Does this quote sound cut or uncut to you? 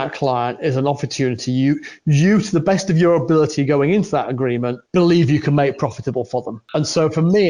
cut